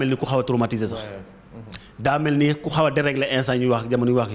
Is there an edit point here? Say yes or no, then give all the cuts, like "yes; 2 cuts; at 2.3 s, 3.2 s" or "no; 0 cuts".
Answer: no; 0 cuts